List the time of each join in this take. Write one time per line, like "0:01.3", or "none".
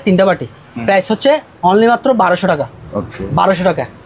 none